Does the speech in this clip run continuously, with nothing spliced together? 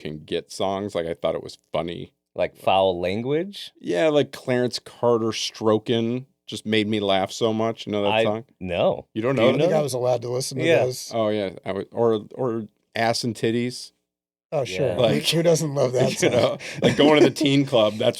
yes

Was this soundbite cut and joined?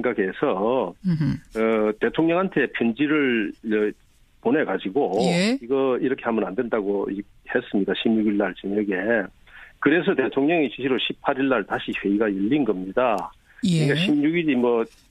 yes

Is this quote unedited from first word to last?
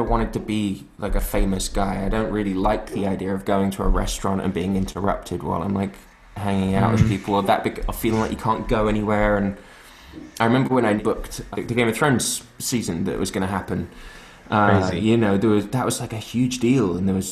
no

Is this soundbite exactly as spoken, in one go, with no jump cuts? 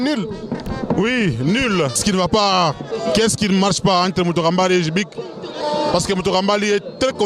no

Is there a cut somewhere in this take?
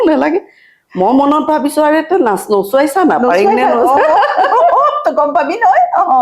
no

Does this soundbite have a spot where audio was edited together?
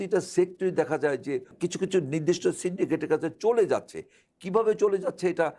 yes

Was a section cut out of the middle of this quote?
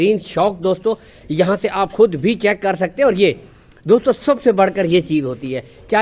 no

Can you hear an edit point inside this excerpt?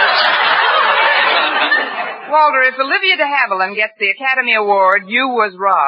no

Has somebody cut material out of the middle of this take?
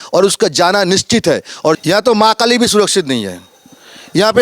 yes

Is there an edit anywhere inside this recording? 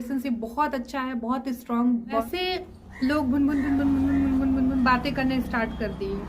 yes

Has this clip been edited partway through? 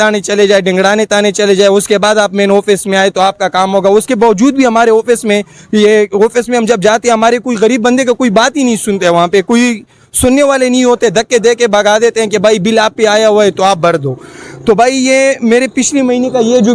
no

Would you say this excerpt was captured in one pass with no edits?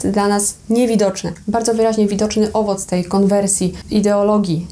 no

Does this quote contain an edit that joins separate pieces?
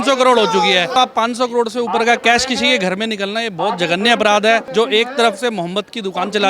yes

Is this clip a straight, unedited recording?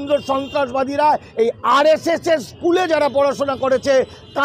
yes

